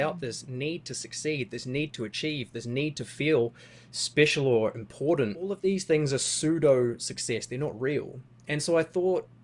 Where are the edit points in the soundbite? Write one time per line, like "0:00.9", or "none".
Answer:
0:05.6